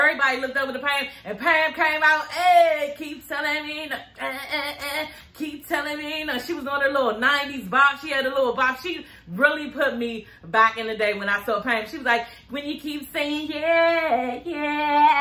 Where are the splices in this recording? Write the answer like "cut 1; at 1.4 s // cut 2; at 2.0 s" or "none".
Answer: none